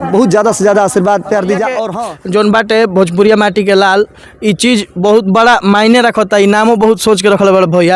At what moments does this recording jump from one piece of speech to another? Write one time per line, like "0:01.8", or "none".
0:01.9

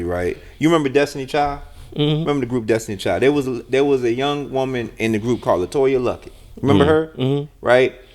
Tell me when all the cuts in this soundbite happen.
none

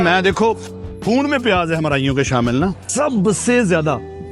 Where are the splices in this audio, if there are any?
0:02.8

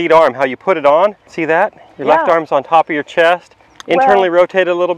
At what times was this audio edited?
0:01.3

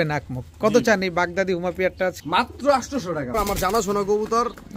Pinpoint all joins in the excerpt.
0:02.2
0:03.3

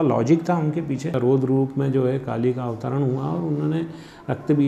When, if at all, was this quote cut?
0:01.1

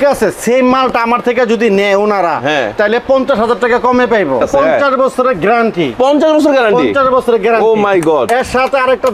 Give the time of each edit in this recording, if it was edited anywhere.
0:04.5

